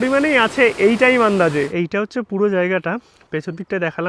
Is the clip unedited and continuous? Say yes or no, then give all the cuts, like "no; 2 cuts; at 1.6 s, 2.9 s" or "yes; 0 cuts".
no; 1 cut; at 1.7 s